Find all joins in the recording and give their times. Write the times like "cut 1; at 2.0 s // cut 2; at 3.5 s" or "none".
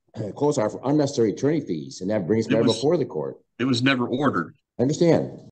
cut 1; at 3.4 s // cut 2; at 4.6 s